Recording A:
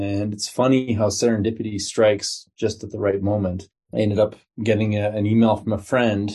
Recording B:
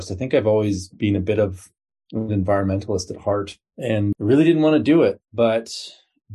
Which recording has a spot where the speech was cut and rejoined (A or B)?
B